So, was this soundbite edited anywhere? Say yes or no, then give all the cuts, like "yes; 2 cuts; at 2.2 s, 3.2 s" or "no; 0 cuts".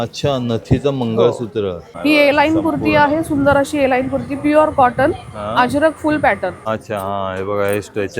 yes; 2 cuts; at 1.9 s, 6.6 s